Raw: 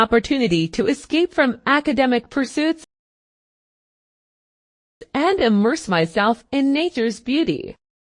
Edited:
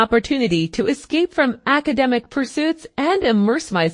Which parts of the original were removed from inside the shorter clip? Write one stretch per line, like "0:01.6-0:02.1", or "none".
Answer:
0:02.9-0:05.0